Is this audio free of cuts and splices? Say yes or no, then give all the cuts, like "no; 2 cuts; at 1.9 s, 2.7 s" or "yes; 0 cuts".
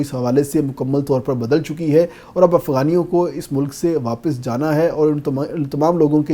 yes; 0 cuts